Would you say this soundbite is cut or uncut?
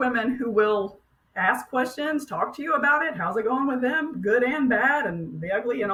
uncut